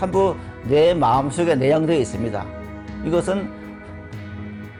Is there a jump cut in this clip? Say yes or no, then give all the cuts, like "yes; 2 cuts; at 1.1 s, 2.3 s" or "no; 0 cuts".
no; 0 cuts